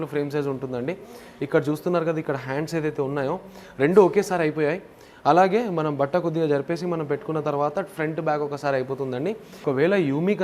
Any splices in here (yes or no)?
yes